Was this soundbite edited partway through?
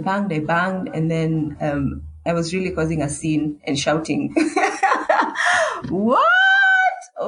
no; 0 cuts

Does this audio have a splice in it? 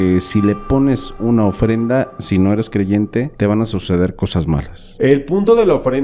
yes; 2 cuts; at 3.3 s, 4.8 s

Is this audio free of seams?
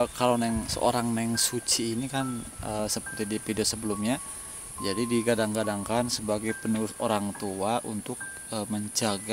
yes; 0 cuts

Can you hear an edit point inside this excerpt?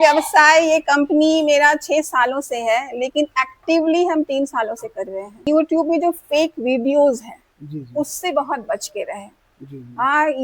yes; 1 cut; at 5.4 s

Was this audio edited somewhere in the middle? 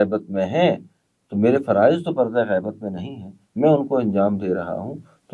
no; 0 cuts

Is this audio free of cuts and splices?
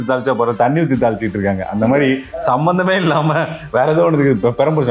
yes; 0 cuts

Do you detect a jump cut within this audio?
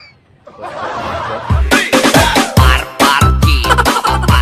yes; 1 cut; at 1.6 s

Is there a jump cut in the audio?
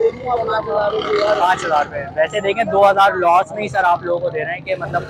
no; 0 cuts

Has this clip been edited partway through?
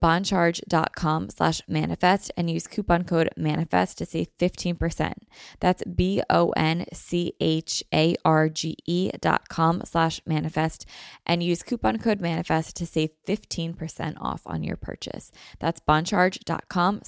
no; 0 cuts

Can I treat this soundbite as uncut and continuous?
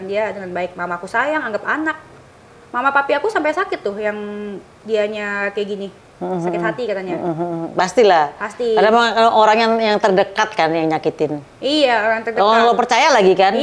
yes; 0 cuts

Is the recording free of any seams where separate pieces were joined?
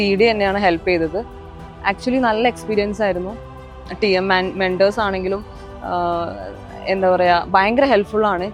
yes; 0 cuts

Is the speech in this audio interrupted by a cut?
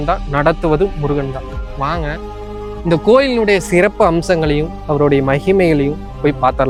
no; 0 cuts

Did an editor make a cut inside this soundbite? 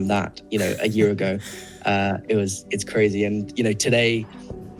no; 0 cuts

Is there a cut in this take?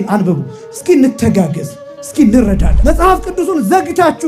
yes; 1 cut; at 2.7 s

